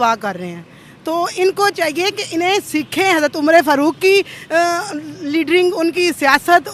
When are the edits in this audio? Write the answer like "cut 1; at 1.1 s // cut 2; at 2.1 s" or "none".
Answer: none